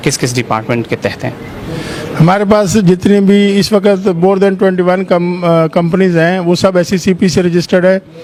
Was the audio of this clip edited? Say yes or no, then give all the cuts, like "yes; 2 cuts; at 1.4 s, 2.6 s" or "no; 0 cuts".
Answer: no; 0 cuts